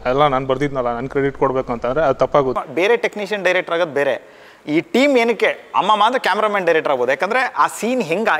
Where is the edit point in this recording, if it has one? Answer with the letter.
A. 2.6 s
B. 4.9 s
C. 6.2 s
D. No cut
A